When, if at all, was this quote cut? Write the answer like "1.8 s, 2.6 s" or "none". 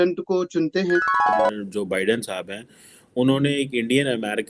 1.3 s